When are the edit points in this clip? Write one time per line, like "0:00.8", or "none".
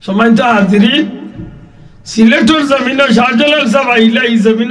none